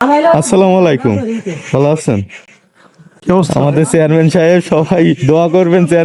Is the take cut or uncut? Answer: uncut